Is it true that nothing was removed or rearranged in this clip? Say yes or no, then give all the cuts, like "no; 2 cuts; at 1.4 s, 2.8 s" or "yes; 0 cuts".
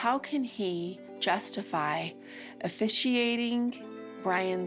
yes; 0 cuts